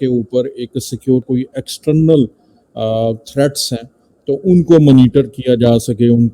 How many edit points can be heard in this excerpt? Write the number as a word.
one